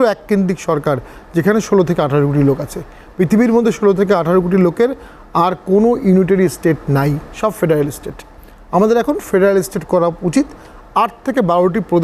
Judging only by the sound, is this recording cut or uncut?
uncut